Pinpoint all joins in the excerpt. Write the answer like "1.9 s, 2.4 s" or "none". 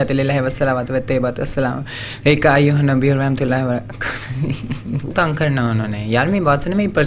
5.1 s